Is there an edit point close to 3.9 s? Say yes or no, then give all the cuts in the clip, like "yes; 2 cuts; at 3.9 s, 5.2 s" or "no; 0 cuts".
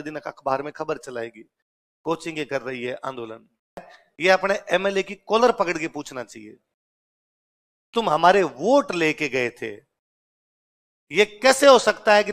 yes; 1 cut; at 3.9 s